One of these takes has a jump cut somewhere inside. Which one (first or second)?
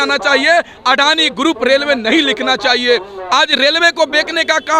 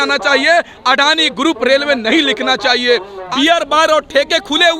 second